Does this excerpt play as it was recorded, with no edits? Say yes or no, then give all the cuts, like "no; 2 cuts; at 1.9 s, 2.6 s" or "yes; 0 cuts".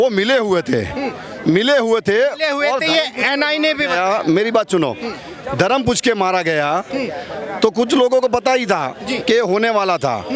yes; 0 cuts